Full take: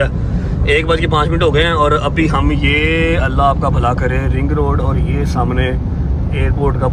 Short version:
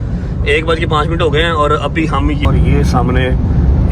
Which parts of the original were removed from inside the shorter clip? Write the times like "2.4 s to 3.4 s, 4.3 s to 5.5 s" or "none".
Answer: 2.7 s to 4.9 s